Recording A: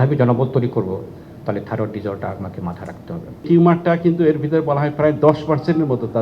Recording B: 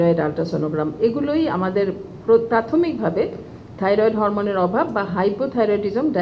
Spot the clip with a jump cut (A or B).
A